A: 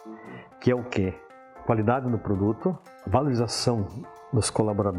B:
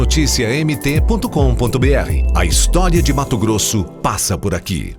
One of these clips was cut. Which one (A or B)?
A